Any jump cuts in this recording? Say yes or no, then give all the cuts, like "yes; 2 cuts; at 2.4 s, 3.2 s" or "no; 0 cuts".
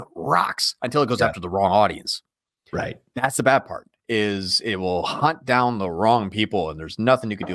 no; 0 cuts